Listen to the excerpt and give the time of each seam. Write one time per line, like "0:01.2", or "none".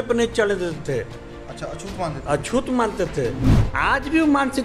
0:03.6